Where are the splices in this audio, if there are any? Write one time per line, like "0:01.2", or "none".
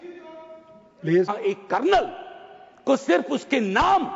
0:01.3